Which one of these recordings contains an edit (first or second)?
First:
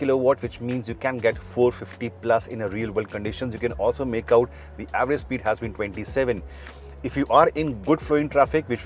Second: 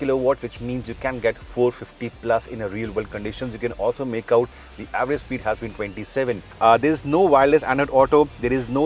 second